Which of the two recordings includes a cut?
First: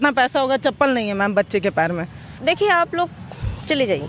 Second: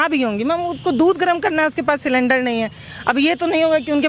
first; 1 cut; at 2.4 s

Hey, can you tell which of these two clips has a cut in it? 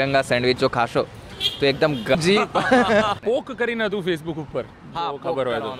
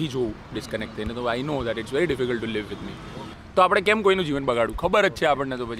first; 2 cuts; at 2.2 s, 3.2 s

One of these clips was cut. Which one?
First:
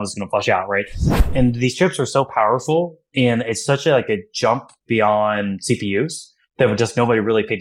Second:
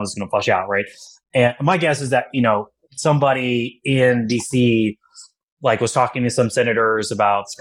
first; 1 cut; at 1.2 s

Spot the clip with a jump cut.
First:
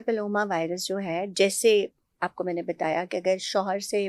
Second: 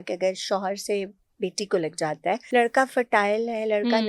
second; 1 cut; at 2.4 s

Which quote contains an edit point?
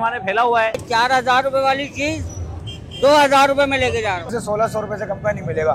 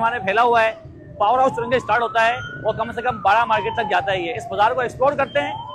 first; 2 cuts; at 0.8 s, 4.3 s

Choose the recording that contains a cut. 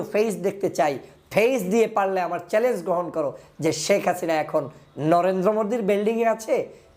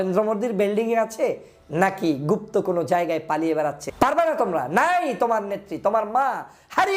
second; 1 cut; at 3.8 s

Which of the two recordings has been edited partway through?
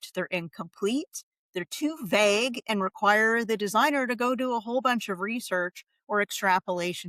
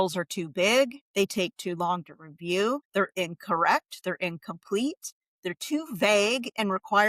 second; 2 cuts; at 1.0 s, 2.8 s

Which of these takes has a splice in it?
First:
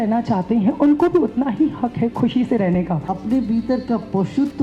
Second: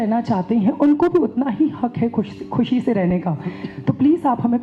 first; 2 cuts; at 2.1 s, 3.0 s

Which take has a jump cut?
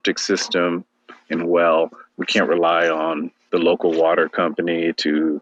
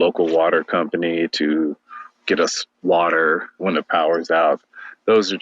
second; 3 cuts; at 2.7 s, 3.6 s, 4.6 s

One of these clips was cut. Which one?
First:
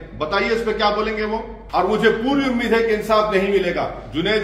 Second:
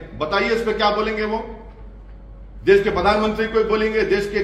first; 1 cut; at 1.6 s

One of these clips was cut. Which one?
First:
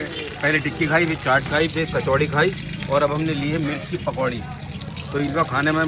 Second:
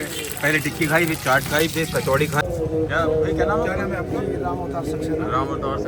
second; 1 cut; at 2.4 s

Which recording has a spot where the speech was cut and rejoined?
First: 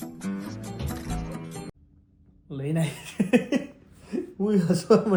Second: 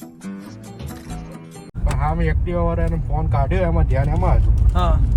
second; 1 cut; at 1.8 s

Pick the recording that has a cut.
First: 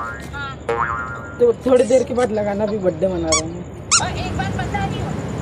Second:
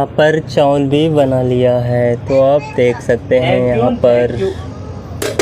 first; 1 cut; at 4.0 s

